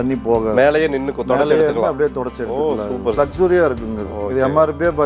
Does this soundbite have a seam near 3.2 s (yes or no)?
yes